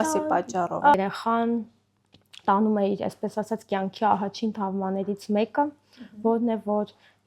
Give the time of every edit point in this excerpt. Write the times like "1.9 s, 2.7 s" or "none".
0.9 s